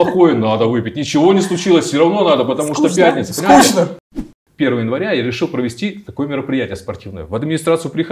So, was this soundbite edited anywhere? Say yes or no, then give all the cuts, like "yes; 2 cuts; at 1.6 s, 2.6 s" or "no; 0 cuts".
yes; 1 cut; at 4.0 s